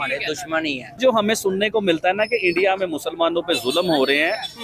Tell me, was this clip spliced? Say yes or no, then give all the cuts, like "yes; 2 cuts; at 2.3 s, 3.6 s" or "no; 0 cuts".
yes; 1 cut; at 1.0 s